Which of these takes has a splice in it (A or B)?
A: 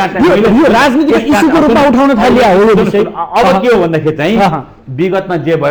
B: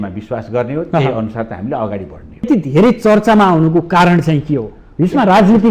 B